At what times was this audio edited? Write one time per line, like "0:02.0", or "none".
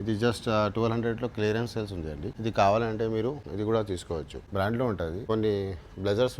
0:02.3
0:03.4
0:04.4
0:05.2